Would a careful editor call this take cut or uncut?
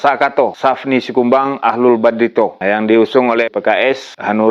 uncut